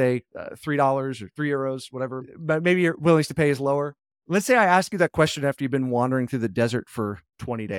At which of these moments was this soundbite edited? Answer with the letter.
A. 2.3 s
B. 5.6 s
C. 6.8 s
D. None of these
A